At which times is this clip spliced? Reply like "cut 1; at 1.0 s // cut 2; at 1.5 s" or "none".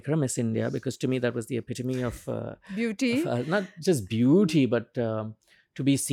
none